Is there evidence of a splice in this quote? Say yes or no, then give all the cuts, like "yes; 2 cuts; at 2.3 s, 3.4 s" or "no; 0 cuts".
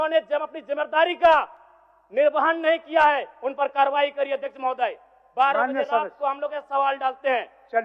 no; 0 cuts